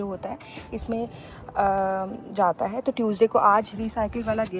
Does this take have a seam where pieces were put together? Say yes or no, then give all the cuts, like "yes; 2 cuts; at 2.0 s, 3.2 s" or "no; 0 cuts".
no; 0 cuts